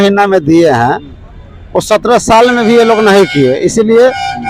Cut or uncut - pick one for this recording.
uncut